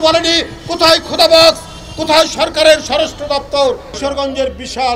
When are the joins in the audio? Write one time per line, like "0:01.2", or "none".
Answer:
0:03.9